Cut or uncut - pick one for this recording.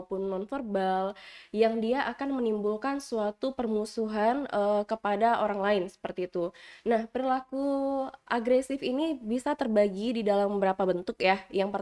uncut